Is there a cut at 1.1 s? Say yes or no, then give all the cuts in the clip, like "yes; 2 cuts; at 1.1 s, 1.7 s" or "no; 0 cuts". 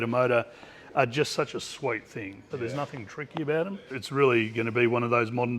no; 2 cuts; at 2.5 s, 3.9 s